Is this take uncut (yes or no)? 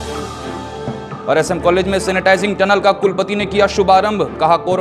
no